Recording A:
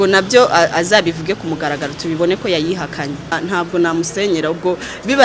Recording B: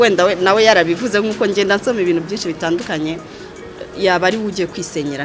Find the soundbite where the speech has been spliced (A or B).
A